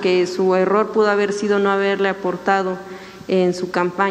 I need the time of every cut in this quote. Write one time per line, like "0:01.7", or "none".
none